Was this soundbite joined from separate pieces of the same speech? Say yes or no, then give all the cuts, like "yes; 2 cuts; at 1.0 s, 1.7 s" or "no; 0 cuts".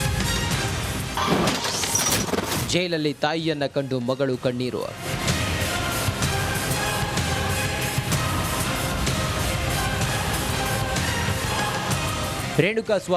no; 0 cuts